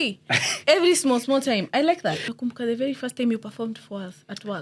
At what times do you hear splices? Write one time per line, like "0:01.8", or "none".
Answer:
0:02.3